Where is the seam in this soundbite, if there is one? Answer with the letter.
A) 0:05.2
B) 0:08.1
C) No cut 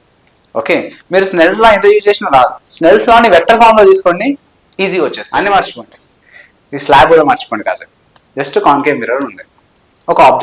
A